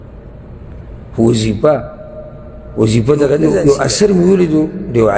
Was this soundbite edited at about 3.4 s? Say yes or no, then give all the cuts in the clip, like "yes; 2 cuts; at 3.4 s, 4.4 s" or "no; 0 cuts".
yes; 1 cut; at 3.4 s